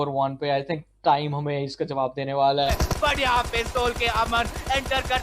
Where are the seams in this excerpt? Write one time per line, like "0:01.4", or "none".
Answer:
0:02.6